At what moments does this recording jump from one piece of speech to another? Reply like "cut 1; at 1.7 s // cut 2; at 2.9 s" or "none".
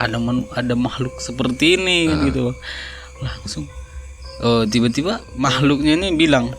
cut 1; at 5.3 s